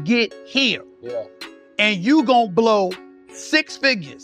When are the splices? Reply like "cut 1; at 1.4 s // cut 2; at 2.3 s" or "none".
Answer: none